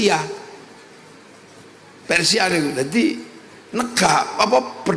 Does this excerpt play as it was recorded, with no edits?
yes; 0 cuts

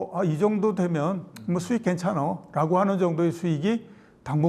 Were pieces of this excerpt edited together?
no; 0 cuts

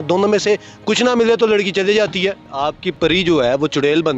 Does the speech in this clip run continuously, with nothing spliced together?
no; 1 cut; at 2.4 s

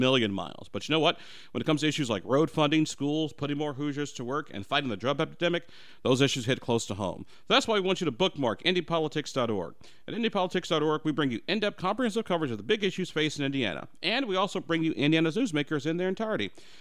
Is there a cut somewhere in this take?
no; 0 cuts

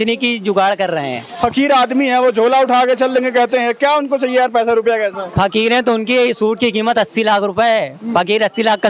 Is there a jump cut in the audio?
no; 0 cuts

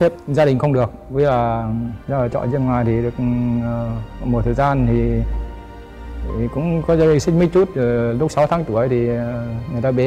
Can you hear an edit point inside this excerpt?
yes; 1 cut; at 1.9 s

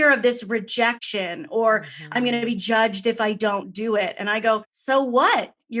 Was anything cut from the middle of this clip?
yes; 2 cuts; at 1.1 s, 4.7 s

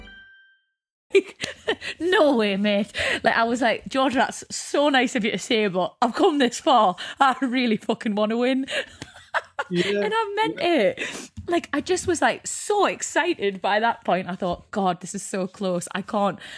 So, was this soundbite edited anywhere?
no; 0 cuts

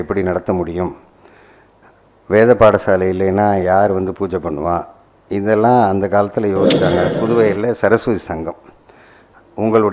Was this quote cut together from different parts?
yes; 1 cut; at 7.1 s

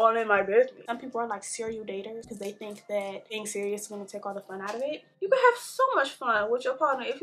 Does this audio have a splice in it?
yes; 4 cuts; at 0.9 s, 2.3 s, 3.4 s, 5.1 s

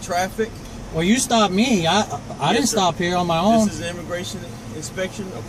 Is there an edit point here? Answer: no; 0 cuts

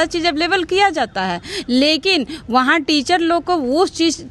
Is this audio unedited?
yes; 0 cuts

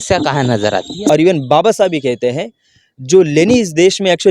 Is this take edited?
yes; 1 cut; at 1.1 s

